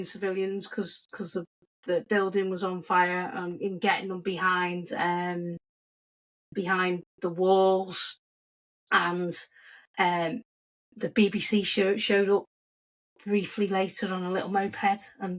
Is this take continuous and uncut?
yes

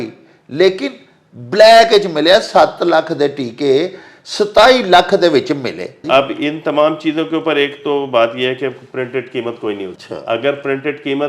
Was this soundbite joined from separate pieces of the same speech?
yes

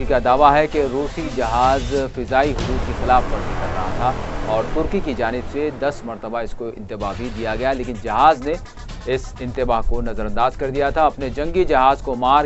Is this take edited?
yes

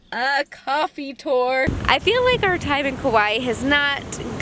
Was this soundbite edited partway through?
yes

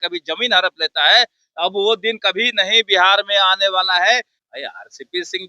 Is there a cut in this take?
yes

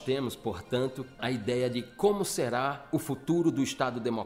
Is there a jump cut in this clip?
yes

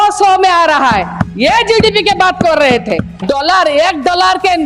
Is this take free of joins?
no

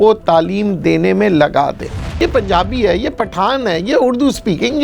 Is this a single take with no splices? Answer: no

